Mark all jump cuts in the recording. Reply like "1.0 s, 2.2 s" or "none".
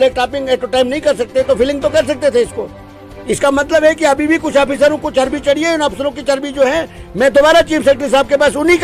none